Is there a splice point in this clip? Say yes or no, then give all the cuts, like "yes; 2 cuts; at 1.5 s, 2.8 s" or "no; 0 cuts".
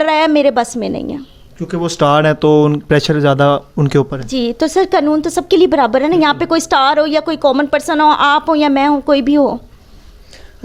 no; 0 cuts